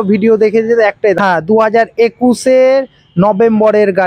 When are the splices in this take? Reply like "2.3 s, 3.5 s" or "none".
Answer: 1.2 s